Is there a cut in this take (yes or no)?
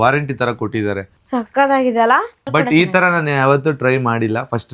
yes